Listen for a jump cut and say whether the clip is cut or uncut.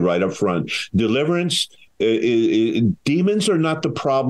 uncut